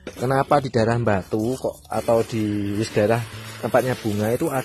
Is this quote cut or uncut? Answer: uncut